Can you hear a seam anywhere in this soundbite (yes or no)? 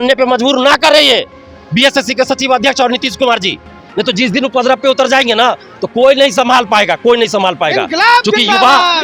no